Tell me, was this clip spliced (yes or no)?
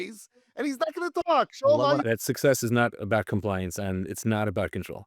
yes